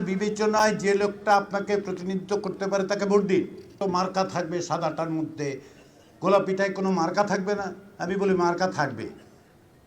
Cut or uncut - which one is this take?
cut